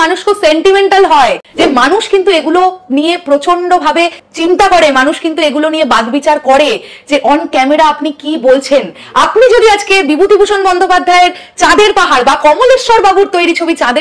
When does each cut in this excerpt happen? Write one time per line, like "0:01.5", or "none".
0:01.5